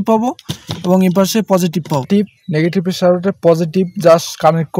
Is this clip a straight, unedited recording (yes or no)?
no